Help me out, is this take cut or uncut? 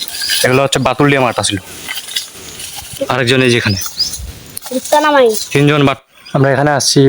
cut